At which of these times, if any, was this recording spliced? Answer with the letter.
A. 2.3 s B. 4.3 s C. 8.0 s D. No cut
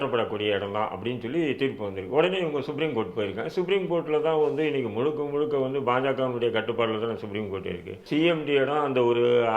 C